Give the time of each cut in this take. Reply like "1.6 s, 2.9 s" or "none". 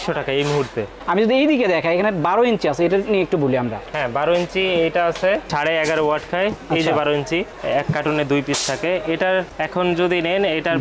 none